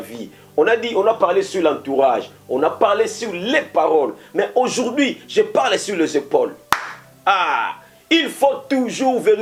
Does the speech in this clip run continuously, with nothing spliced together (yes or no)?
yes